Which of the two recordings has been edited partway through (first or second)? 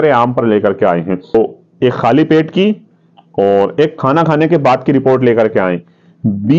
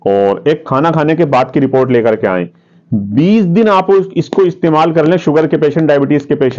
first